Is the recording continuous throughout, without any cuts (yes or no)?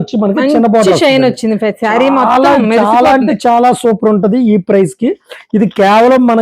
yes